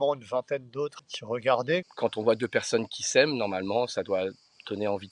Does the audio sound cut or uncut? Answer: cut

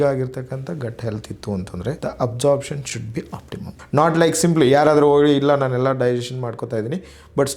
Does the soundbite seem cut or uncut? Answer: cut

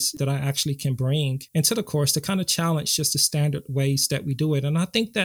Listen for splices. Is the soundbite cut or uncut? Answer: uncut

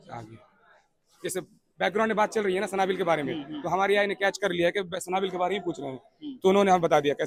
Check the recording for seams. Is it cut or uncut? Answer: uncut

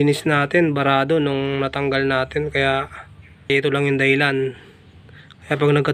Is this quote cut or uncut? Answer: cut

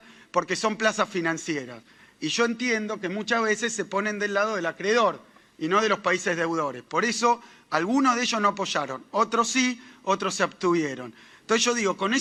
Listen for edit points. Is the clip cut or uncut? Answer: uncut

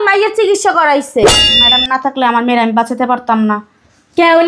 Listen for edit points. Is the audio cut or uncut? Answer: cut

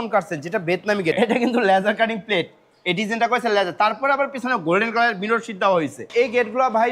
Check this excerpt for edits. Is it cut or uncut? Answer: cut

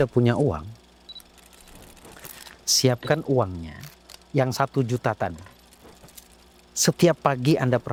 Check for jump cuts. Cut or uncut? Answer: uncut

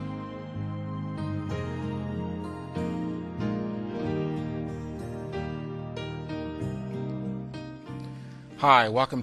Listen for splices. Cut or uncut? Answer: cut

